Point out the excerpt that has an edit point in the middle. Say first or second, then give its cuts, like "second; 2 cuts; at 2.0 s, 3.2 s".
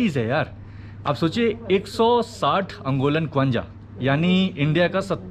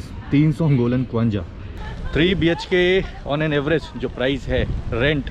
second; 1 cut; at 1.6 s